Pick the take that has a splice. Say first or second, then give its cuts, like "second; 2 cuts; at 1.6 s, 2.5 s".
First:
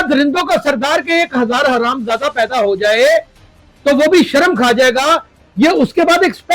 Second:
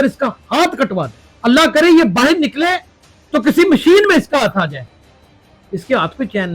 second; 1 cut; at 1.2 s